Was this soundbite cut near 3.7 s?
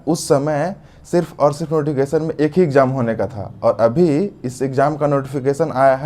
no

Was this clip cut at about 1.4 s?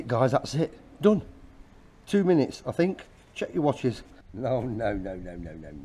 no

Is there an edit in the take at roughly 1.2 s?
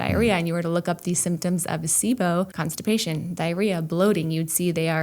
no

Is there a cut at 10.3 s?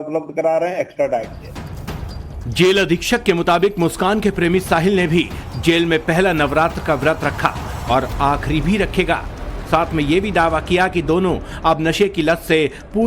yes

